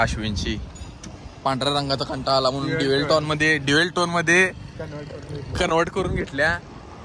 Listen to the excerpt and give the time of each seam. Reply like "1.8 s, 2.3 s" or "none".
none